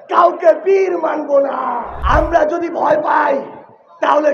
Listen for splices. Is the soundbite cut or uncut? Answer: cut